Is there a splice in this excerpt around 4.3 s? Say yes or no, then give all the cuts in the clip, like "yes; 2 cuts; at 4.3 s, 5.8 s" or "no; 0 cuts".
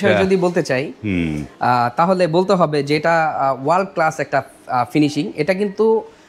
no; 0 cuts